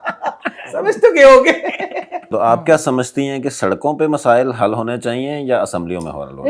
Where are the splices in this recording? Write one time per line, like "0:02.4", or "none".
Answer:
0:02.3